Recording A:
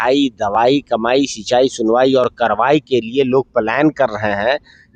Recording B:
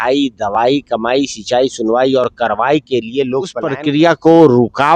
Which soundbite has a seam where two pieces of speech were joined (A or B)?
B